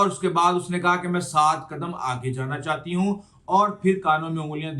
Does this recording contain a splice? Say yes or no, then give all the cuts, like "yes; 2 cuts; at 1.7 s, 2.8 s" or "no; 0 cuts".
no; 0 cuts